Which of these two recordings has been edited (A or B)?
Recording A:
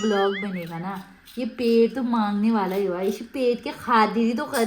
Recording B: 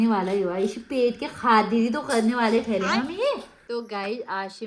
B